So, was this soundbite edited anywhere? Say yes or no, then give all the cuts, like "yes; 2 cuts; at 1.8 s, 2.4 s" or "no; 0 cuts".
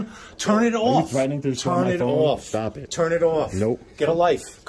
no; 0 cuts